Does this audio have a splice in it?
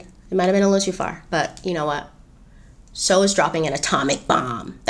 no; 0 cuts

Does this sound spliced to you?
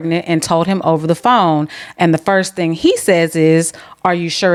no; 0 cuts

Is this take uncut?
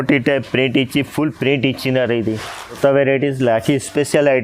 no; 1 cut; at 2.8 s

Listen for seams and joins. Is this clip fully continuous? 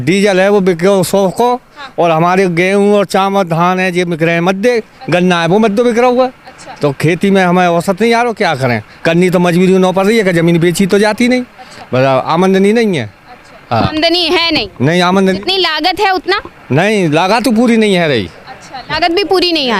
yes; 0 cuts

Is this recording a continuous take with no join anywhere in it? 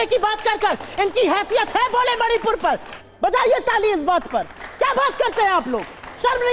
no; 1 cut; at 3.0 s

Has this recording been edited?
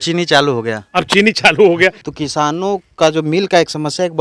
yes; 1 cut; at 2.1 s

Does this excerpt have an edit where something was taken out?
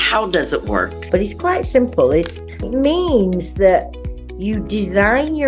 yes; 1 cut; at 1.0 s

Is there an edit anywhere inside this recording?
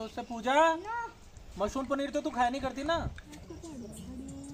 yes; 1 cut; at 3.4 s

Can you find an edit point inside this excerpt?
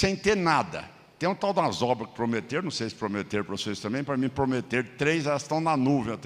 no; 0 cuts

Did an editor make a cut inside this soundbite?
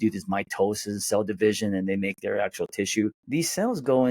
yes; 1 cut; at 3.2 s

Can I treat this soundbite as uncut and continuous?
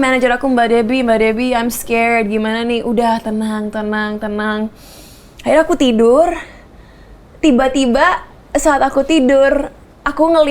yes; 0 cuts

